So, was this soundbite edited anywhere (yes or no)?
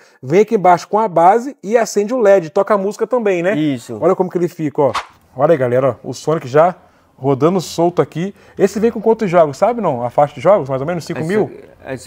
yes